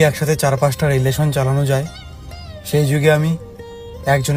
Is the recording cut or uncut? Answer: uncut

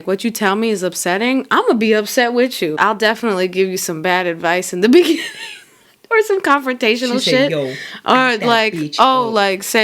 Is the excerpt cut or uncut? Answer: cut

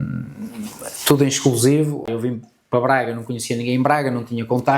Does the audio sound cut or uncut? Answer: cut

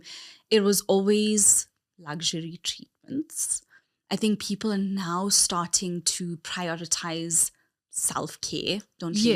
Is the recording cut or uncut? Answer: uncut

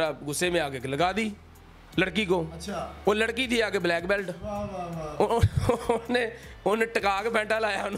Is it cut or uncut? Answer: uncut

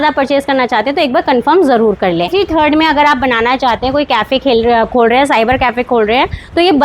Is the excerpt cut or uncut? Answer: cut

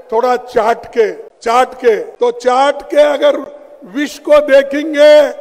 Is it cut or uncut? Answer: cut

